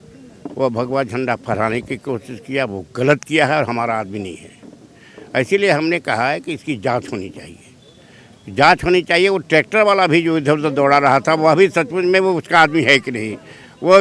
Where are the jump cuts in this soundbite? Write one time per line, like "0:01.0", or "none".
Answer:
none